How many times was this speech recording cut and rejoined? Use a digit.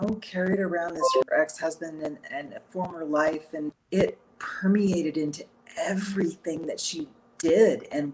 2